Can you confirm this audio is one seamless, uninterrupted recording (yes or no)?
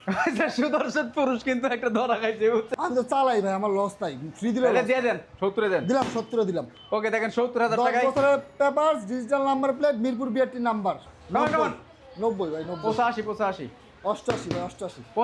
no